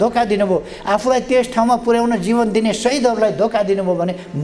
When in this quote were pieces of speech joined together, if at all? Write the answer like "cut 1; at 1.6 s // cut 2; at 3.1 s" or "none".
none